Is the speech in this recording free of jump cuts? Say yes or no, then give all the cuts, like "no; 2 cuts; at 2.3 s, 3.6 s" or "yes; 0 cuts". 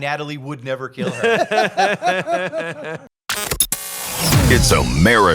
no; 1 cut; at 3.0 s